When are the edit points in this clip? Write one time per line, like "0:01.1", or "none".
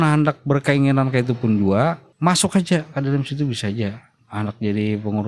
0:02.1
0:04.2

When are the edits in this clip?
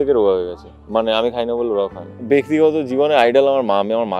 0:02.1

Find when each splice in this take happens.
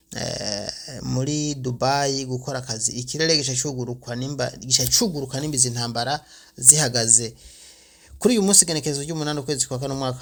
none

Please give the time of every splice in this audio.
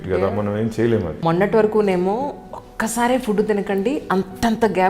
0:01.1

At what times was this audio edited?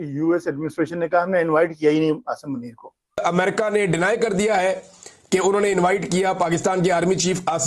0:03.2

